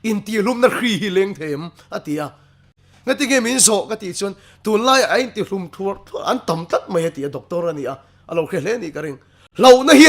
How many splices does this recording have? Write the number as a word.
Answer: one